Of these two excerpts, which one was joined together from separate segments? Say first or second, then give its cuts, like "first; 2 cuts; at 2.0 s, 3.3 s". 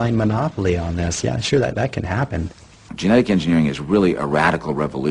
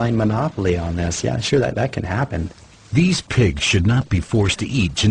first; 1 cut; at 2.8 s